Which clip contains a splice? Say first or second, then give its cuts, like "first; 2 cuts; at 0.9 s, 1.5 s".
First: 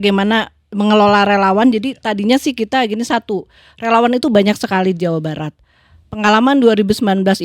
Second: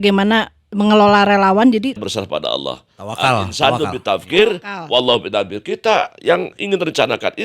second; 1 cut; at 2.0 s